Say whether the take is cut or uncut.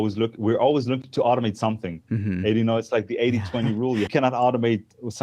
cut